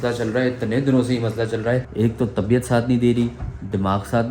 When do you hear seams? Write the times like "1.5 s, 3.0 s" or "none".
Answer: 1.9 s